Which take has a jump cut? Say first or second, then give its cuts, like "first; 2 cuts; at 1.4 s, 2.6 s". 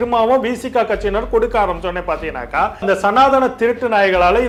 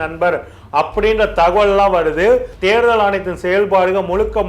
second; 1 cut; at 2.5 s